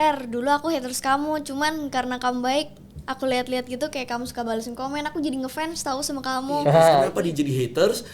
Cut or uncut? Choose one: cut